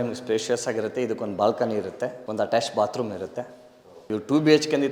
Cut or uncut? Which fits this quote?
uncut